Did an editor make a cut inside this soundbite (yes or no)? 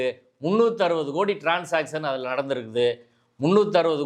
no